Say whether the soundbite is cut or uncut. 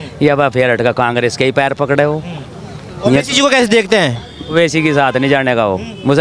uncut